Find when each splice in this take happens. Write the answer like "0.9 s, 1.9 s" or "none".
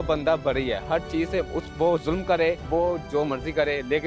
2.6 s

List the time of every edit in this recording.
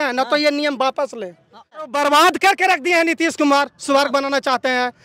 1.8 s

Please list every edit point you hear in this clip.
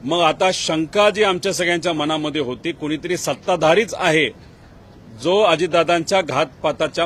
none

